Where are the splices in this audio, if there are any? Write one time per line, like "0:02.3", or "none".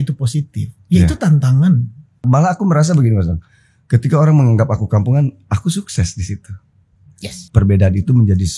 0:02.2
0:07.5